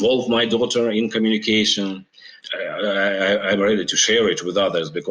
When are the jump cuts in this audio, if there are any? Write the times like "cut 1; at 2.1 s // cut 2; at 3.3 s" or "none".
cut 1; at 2.3 s